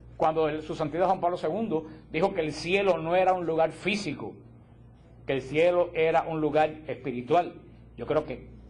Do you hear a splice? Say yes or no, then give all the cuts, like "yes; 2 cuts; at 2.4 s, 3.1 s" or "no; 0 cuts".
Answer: yes; 1 cut; at 2.4 s